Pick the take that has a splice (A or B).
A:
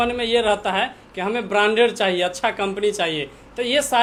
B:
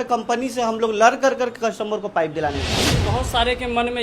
B